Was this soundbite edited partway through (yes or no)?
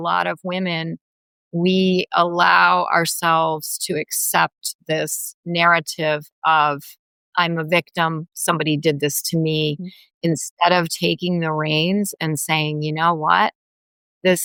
no